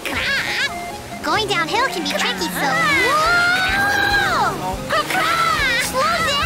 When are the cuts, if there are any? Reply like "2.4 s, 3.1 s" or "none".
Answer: 4.7 s